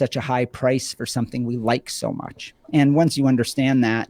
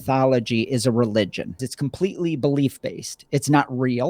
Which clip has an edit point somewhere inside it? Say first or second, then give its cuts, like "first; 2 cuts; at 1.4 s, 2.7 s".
second; 1 cut; at 1.7 s